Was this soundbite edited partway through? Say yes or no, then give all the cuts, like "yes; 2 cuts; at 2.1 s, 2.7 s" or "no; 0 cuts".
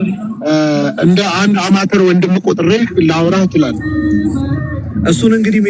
no; 0 cuts